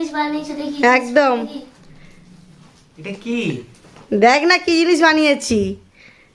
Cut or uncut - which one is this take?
uncut